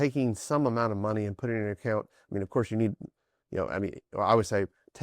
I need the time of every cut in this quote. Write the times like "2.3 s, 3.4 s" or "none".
none